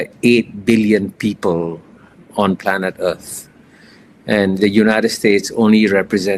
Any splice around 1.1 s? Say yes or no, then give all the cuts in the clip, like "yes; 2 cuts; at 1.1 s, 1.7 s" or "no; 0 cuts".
yes; 1 cut; at 1.1 s